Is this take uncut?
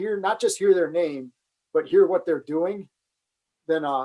yes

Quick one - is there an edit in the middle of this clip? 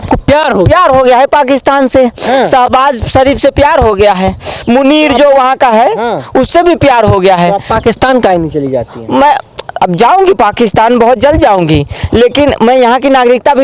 no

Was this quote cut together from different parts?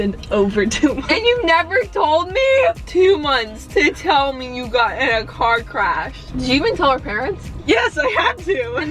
yes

